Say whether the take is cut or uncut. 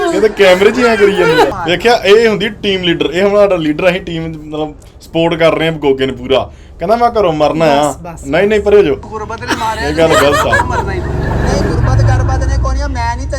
cut